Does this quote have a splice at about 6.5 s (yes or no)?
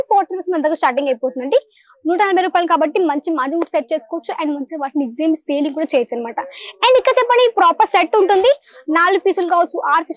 no